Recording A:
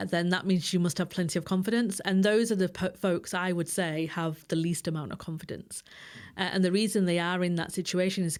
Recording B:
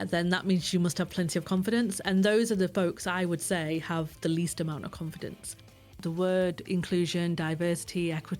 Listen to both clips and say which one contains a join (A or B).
B